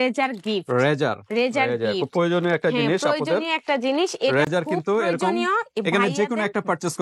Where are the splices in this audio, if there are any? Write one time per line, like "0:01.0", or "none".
none